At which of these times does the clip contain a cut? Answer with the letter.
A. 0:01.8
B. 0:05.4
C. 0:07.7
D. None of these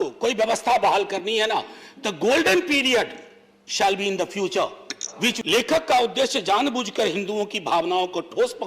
B